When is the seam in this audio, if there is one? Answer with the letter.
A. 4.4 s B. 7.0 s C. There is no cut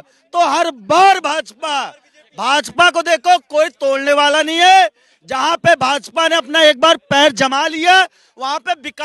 C